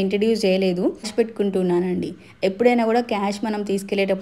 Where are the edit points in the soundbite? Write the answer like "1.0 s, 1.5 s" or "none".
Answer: 1.1 s